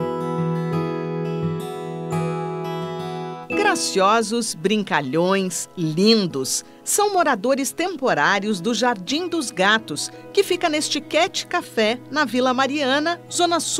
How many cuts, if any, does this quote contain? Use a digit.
0